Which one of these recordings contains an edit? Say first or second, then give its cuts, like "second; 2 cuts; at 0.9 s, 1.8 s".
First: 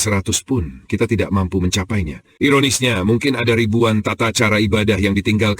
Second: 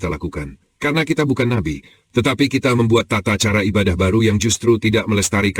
first; 1 cut; at 2.2 s